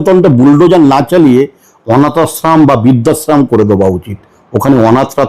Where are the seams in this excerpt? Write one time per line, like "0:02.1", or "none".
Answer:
none

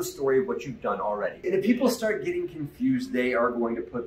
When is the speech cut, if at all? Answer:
0:01.5

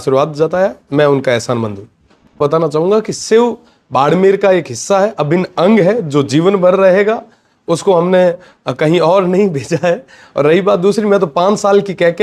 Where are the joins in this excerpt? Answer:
0:02.4

